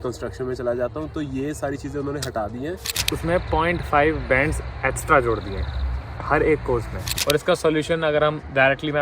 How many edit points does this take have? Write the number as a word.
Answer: two